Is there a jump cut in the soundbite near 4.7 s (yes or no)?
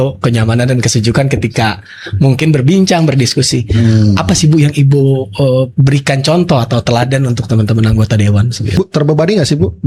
no